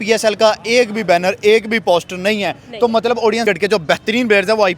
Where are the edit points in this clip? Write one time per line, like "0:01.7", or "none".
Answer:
0:03.4